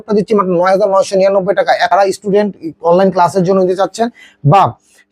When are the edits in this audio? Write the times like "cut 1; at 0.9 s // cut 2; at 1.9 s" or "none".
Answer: cut 1; at 1.9 s